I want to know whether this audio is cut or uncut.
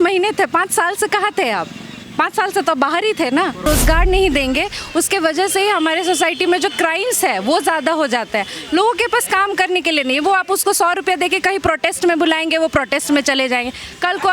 cut